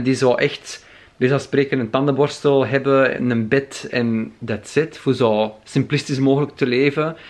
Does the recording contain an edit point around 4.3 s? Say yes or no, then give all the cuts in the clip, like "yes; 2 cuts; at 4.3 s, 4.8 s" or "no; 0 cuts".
no; 0 cuts